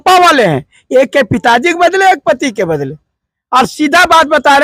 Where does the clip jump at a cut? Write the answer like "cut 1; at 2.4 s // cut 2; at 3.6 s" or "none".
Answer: none